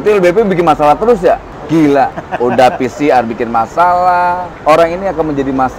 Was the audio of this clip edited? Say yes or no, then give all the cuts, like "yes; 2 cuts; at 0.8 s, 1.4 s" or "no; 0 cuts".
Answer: yes; 3 cuts; at 1.5 s, 2.2 s, 4.5 s